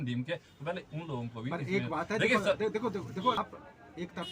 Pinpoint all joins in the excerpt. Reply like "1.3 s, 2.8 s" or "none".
3.4 s